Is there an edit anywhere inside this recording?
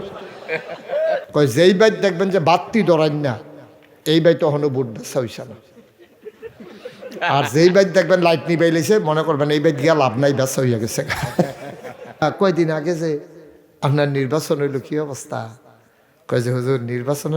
yes; 2 cuts; at 1.3 s, 12.2 s

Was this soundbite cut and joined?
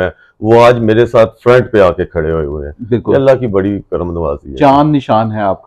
no; 0 cuts

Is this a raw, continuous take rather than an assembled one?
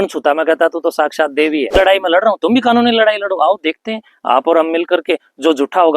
no; 1 cut; at 1.7 s

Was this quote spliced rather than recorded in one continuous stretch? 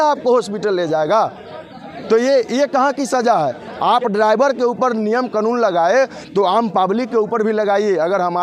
no; 0 cuts

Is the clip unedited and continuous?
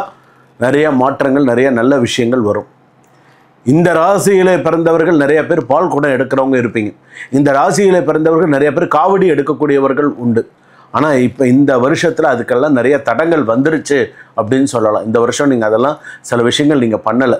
yes; 0 cuts

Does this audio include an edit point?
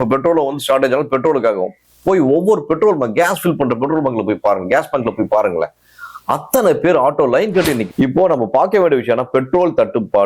yes; 1 cut; at 7.9 s

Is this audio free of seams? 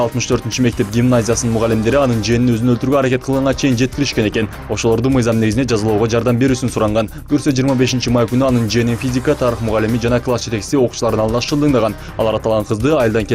no; 1 cut; at 1.7 s

